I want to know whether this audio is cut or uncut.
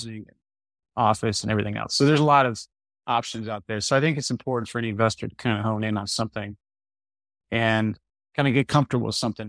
cut